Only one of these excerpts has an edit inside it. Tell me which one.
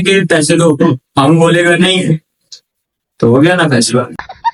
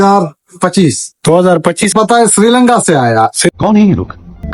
second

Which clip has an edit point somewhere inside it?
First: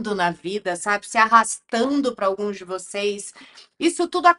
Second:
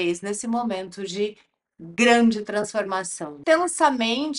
second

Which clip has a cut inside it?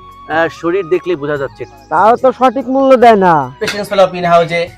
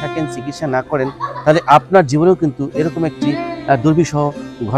first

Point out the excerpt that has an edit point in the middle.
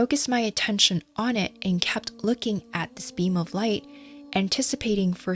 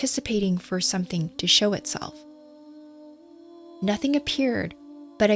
second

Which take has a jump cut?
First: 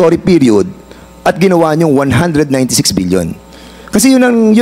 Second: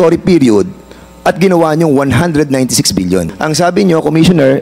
second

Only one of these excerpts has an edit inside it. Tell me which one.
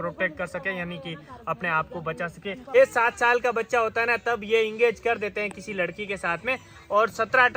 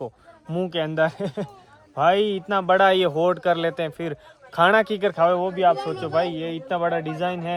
first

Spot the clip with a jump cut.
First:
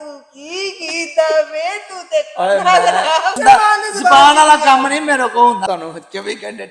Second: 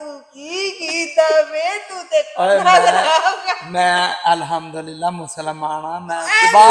first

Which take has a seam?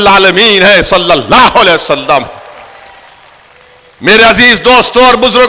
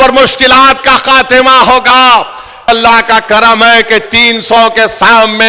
second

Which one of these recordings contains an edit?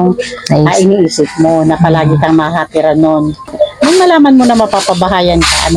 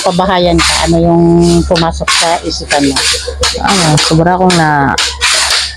first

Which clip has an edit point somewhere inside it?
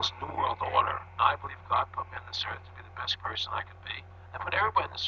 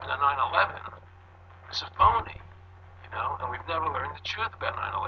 first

